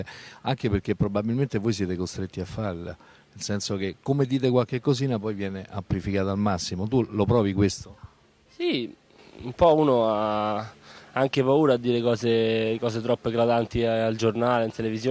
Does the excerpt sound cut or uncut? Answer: cut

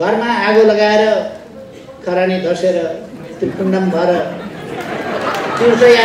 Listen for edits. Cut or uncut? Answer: uncut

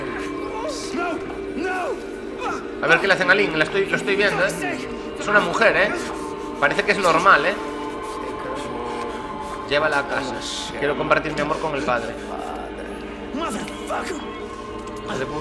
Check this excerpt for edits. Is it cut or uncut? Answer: uncut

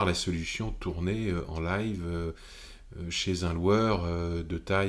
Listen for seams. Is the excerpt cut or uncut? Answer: uncut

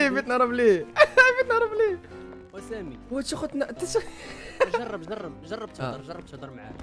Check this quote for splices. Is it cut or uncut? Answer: uncut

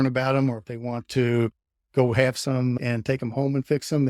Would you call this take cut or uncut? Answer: cut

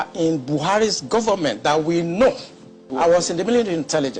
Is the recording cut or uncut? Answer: cut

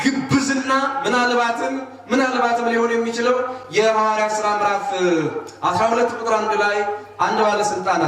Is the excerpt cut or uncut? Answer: uncut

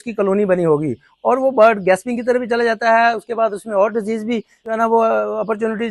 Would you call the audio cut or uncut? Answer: uncut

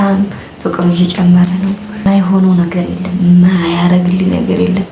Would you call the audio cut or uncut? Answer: cut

